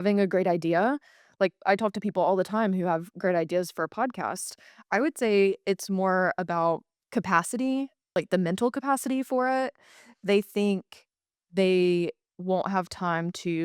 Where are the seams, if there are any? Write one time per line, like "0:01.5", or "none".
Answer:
0:06.9
0:08.0